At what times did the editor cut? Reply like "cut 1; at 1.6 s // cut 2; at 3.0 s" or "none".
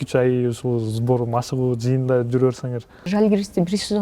cut 1; at 3.1 s